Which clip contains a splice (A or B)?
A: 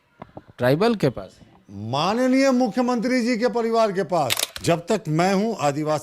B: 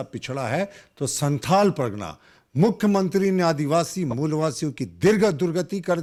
A